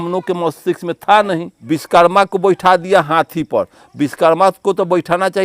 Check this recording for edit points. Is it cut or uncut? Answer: cut